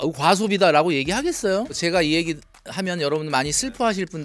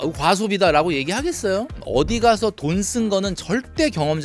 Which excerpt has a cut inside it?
second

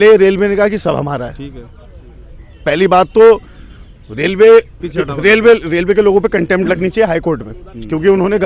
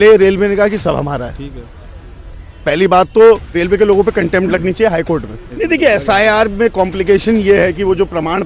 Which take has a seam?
second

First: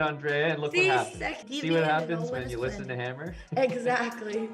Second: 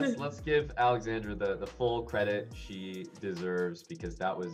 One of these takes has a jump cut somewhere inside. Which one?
first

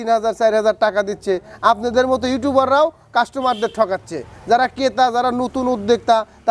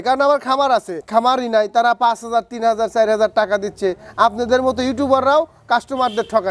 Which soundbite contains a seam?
second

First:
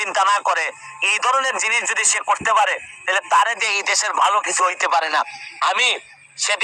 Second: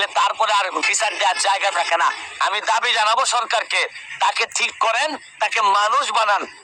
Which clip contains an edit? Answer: second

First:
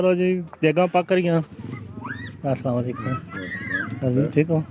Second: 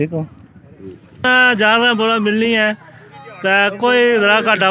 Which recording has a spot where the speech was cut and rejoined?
second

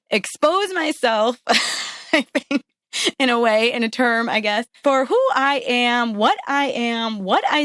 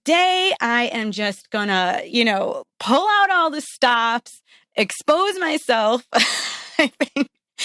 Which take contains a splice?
first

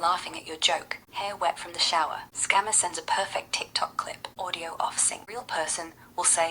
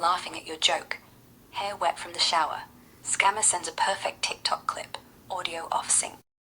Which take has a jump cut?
first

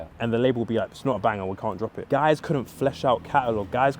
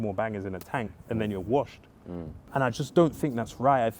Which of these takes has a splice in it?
first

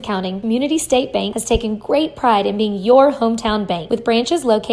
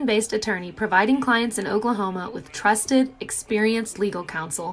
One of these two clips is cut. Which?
second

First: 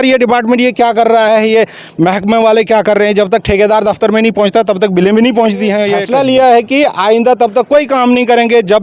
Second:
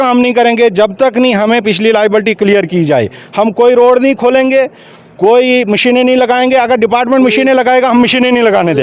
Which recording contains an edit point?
first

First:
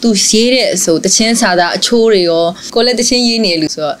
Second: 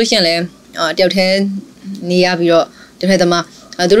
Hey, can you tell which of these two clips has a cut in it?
first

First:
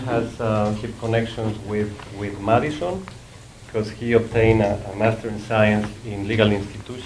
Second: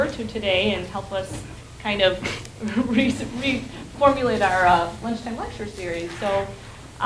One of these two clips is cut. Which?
second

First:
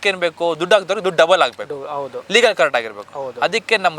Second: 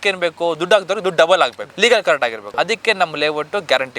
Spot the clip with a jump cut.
second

